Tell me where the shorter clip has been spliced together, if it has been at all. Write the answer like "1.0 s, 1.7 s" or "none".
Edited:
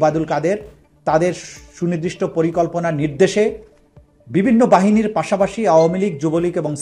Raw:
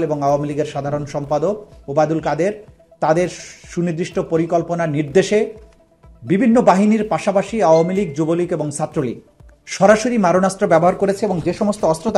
none